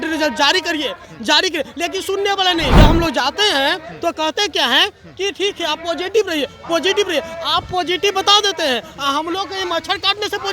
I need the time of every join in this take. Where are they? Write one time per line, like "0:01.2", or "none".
0:02.8